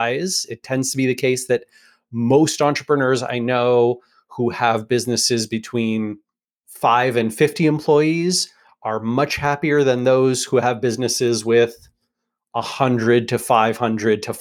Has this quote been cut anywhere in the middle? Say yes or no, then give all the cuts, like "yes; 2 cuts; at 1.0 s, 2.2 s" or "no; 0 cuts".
no; 0 cuts